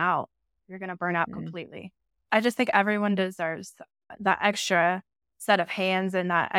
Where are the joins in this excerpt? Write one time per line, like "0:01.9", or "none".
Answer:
0:02.3
0:04.1